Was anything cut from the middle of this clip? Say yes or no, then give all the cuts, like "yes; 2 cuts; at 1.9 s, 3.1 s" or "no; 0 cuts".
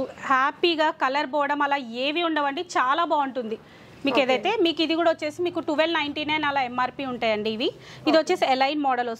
no; 0 cuts